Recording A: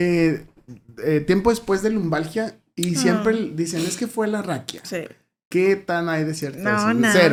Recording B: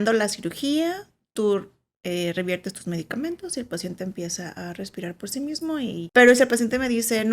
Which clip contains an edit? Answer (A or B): B